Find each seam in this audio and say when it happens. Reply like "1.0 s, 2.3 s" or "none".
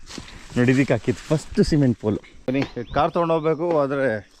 2.4 s